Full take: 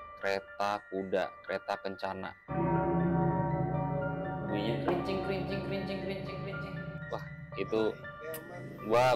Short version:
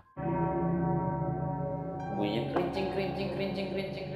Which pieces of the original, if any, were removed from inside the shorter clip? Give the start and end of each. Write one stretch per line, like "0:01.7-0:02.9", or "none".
none